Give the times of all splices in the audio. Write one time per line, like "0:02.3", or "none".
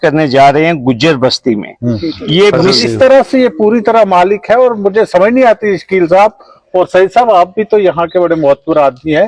0:02.7